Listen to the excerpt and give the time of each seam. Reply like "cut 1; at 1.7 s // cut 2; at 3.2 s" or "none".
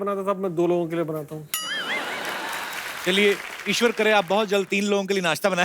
cut 1; at 3.0 s